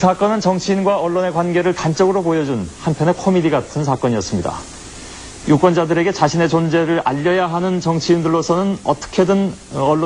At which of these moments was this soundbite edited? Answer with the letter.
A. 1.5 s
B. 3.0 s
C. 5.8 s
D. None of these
B